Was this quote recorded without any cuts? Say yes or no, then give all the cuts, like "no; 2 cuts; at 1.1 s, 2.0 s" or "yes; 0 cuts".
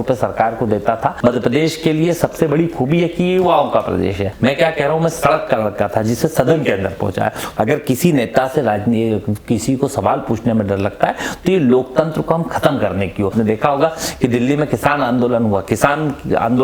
no; 4 cuts; at 1.2 s, 4.3 s, 7.4 s, 13.3 s